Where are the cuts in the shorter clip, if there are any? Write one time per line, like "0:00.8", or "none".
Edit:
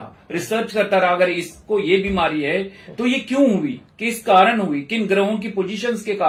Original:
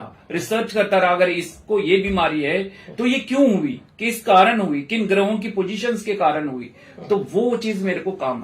none